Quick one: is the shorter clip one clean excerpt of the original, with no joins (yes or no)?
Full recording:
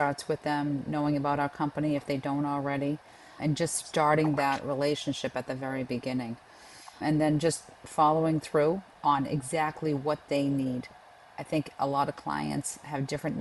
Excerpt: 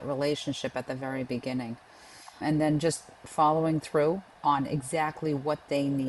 yes